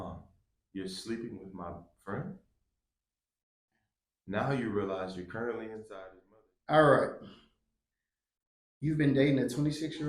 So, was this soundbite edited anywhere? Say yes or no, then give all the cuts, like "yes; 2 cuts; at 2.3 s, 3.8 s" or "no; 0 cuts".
yes; 1 cut; at 5.9 s